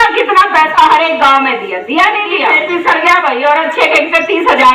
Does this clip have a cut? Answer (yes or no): yes